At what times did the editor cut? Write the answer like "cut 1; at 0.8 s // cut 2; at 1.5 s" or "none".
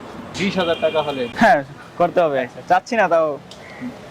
cut 1; at 1.3 s